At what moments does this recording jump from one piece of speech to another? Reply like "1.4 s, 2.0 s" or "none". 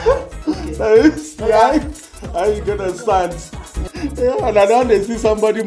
3.8 s

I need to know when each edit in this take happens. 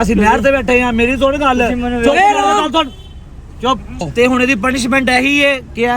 4.1 s

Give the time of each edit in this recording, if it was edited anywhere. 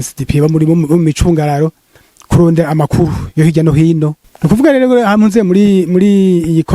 4.2 s

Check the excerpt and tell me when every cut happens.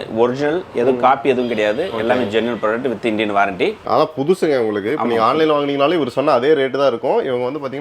3.8 s

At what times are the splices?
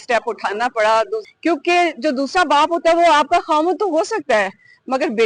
1.2 s

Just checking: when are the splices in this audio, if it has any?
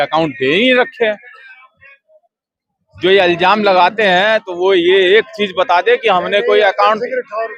none

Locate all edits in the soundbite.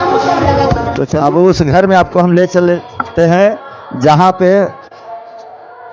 1.0 s

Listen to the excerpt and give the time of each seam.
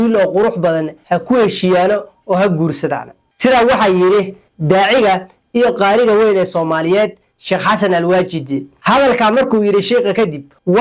none

